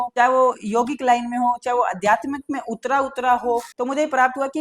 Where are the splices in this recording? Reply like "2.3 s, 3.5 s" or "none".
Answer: 3.6 s